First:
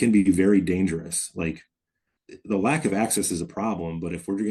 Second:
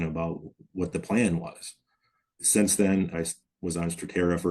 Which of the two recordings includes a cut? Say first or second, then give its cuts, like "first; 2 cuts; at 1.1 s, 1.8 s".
second; 1 cut; at 3.1 s